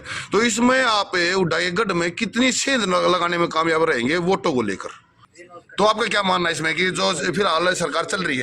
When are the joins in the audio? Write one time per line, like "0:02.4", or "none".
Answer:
0:05.2